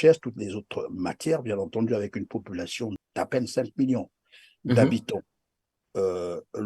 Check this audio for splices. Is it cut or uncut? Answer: cut